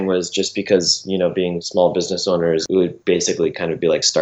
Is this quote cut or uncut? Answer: cut